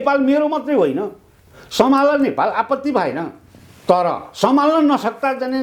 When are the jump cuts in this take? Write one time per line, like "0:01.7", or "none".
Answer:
none